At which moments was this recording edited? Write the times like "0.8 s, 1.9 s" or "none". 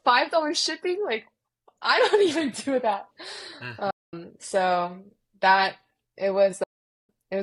none